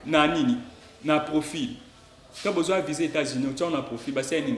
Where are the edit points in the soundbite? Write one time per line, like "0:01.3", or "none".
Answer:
none